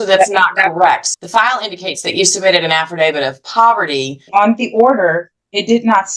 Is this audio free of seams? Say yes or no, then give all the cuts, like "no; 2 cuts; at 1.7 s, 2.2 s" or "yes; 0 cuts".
no; 2 cuts; at 1.1 s, 4.3 s